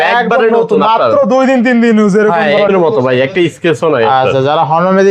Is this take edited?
yes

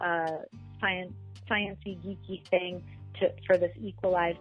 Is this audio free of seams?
yes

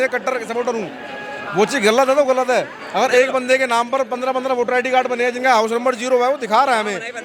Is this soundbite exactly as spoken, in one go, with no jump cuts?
yes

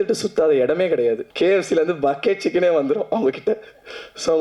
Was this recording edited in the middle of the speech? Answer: yes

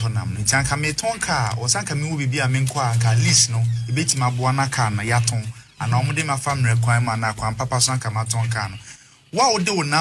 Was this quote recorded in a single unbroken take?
yes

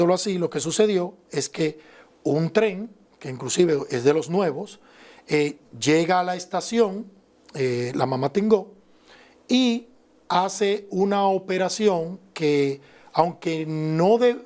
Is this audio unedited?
yes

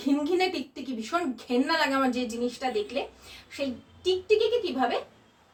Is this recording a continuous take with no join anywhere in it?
yes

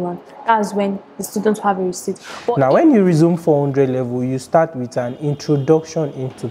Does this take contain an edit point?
yes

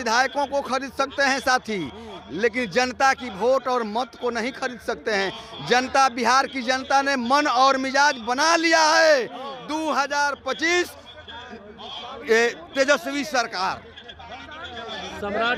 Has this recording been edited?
no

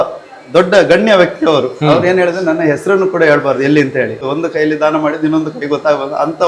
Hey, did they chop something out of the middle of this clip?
yes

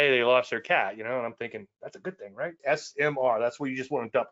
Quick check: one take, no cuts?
no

